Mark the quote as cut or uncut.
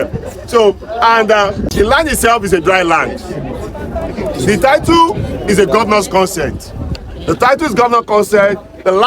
cut